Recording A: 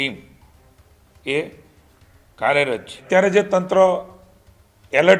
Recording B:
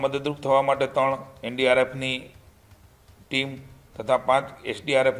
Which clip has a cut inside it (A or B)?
A